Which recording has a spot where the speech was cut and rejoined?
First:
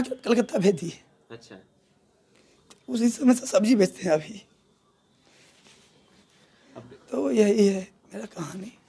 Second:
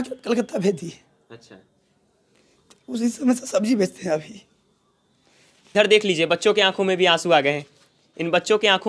second; 1 cut; at 5.7 s

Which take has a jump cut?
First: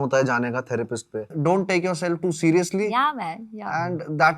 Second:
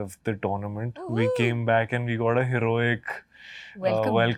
first; 1 cut; at 1.3 s

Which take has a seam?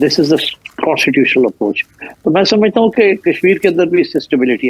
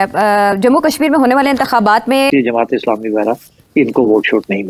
second; 1 cut; at 2.3 s

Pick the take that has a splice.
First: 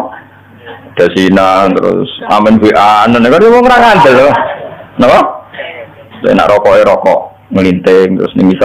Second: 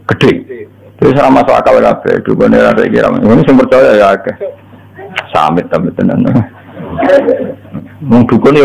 second; 1 cut; at 7.6 s

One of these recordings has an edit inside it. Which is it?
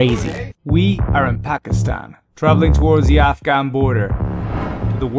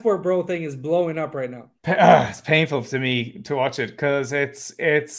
second; 1 cut; at 1.7 s

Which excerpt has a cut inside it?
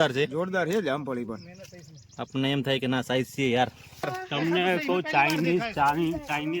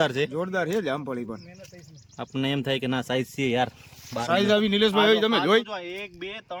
first; 1 cut; at 4.1 s

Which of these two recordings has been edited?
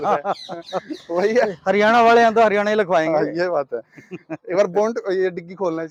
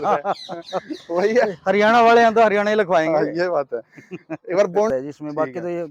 second; 1 cut; at 4.9 s

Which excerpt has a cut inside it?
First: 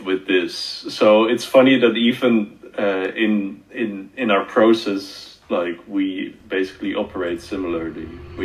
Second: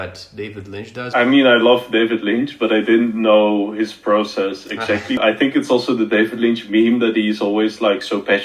second; 2 cuts; at 1.1 s, 5.2 s

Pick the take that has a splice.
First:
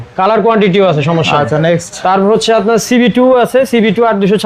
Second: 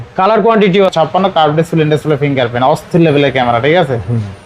second; 1 cut; at 0.9 s

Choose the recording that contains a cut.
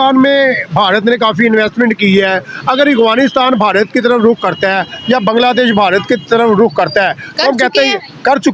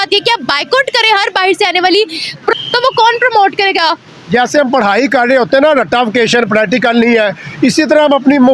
second; 1 cut; at 2.5 s

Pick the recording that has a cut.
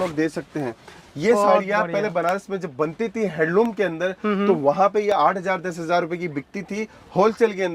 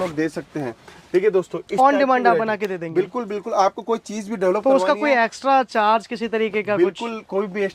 first; 1 cut; at 1.0 s

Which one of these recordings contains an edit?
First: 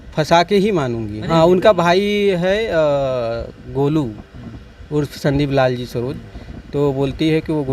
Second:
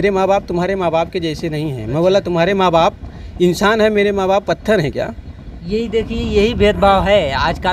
first; 1 cut; at 1.1 s

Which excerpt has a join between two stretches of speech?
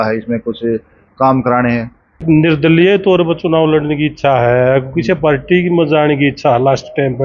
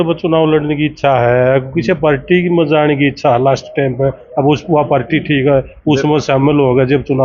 first; 1 cut; at 2.2 s

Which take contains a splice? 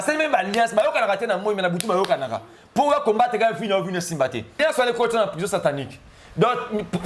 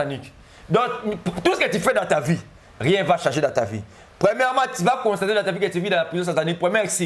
first; 1 cut; at 4.6 s

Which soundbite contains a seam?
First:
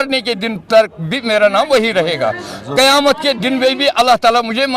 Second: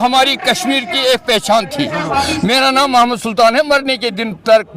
second; 1 cut; at 2.2 s

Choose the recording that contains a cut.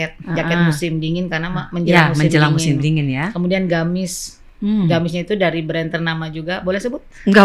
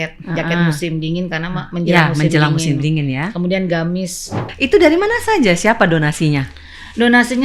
second; 1 cut; at 4.4 s

